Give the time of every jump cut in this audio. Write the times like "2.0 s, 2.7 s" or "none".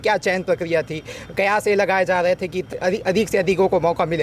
2.2 s